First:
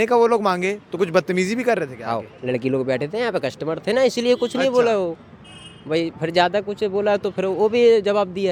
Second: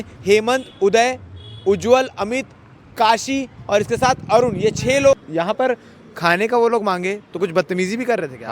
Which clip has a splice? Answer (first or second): second